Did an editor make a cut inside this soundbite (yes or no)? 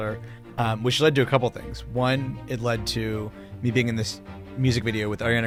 no